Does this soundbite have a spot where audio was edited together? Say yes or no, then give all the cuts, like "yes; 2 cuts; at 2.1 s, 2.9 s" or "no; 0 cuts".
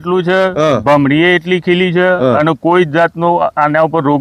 no; 0 cuts